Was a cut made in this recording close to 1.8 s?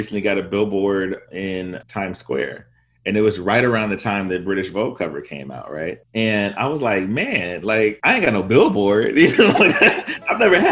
yes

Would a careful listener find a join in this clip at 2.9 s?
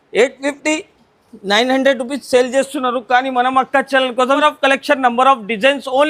no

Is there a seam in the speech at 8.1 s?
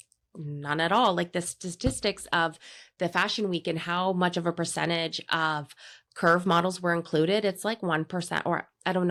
no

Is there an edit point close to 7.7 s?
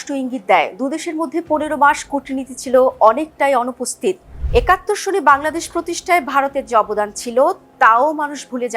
no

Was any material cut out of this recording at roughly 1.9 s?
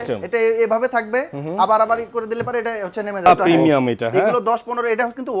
no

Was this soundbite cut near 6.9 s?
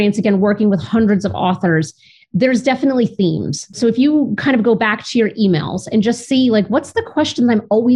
no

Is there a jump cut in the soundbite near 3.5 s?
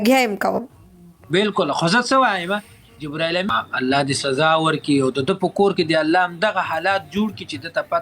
yes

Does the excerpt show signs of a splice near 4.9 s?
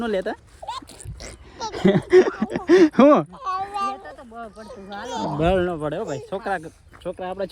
no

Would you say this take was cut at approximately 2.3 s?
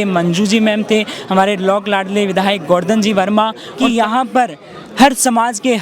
no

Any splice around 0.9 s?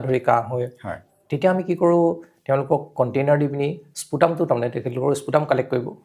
yes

